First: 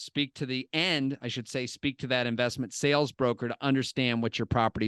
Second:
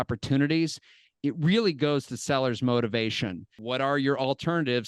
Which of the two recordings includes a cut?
second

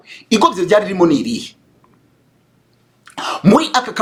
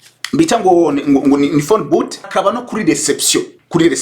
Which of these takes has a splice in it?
second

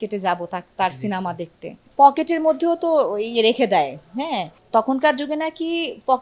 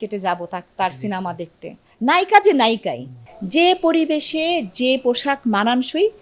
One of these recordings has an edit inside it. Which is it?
second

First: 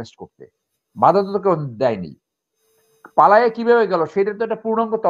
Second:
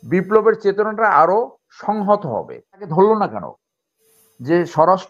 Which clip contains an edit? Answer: second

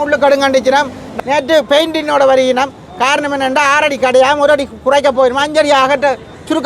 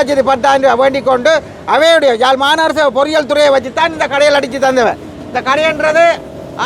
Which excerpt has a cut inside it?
first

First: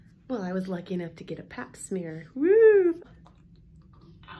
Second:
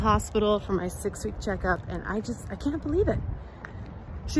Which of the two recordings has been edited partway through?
first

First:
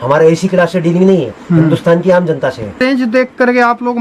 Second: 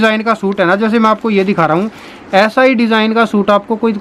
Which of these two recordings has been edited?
first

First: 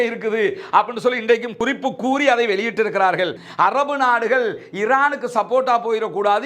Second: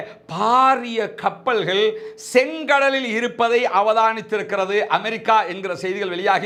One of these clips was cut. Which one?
first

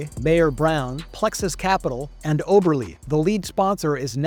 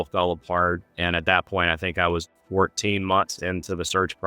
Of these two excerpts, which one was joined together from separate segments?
second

